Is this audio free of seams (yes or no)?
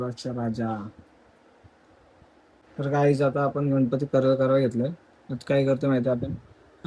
no